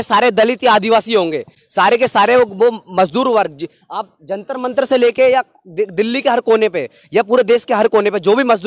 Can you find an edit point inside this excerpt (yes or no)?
no